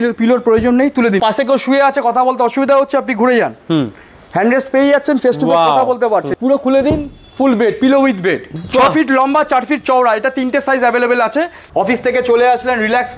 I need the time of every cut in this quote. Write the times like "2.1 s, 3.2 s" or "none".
1.2 s, 6.3 s, 8.5 s, 11.6 s

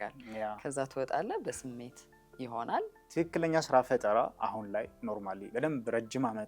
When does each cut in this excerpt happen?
3.0 s

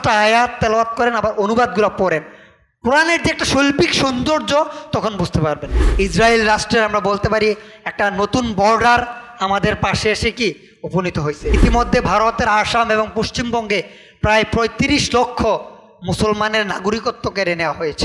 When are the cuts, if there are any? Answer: 5.8 s, 11.5 s

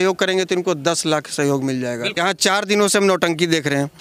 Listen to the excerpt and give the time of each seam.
2.2 s

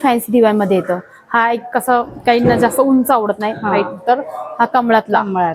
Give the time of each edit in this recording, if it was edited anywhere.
none

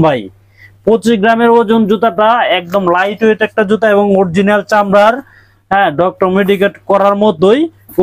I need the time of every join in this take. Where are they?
none

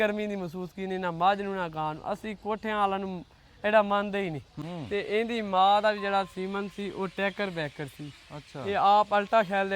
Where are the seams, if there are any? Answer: 4.6 s

